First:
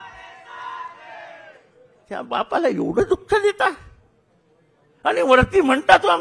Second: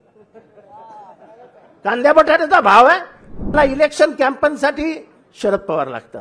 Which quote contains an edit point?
second; 1 cut; at 3.5 s

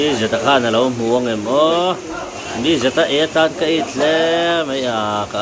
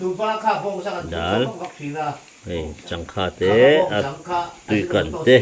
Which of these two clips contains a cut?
first; 1 cut; at 2.3 s

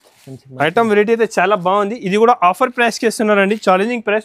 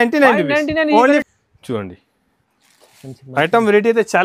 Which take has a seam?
second; 1 cut; at 1.2 s

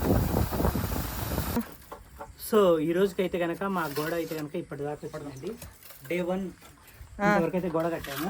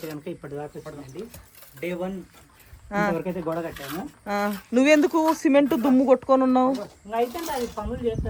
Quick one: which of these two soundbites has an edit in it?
first; 1 cut; at 1.6 s

